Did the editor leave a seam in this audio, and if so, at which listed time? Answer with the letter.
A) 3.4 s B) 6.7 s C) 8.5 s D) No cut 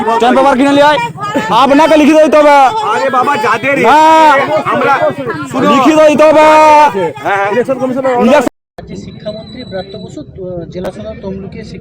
C